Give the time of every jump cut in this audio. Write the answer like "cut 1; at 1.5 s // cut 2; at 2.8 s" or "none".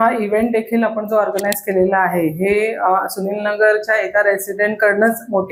none

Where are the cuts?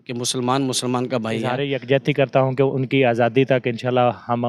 cut 1; at 1.6 s

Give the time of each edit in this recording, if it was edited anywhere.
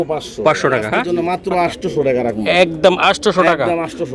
cut 1; at 1.1 s

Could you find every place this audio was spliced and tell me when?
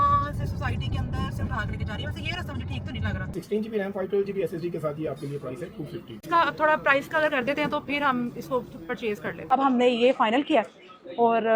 cut 1; at 3.3 s // cut 2; at 6.1 s // cut 3; at 9.5 s

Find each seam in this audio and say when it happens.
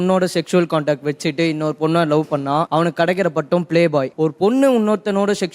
cut 1; at 2.7 s // cut 2; at 4.1 s

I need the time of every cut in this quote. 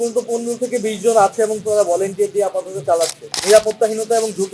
cut 1; at 3.3 s

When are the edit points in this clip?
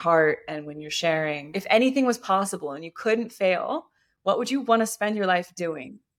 cut 1; at 1.5 s

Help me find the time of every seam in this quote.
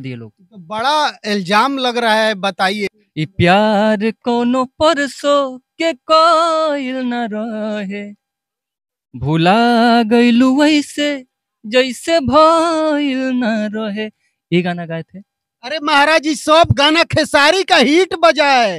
cut 1; at 3.0 s

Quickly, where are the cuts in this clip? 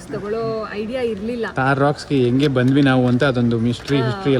none

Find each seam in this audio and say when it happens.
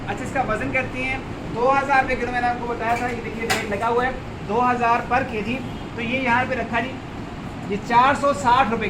none

